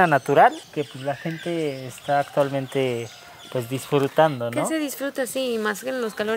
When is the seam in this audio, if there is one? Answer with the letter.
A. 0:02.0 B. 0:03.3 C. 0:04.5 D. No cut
D